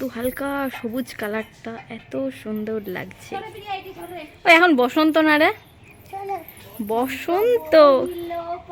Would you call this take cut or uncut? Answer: uncut